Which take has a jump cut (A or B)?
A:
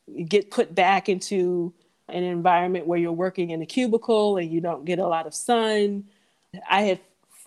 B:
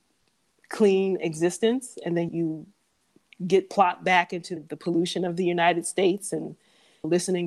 B